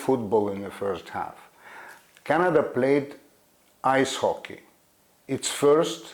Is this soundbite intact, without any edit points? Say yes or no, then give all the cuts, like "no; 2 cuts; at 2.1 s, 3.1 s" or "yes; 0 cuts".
yes; 0 cuts